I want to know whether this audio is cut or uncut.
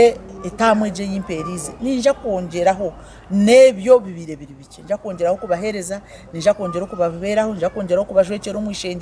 uncut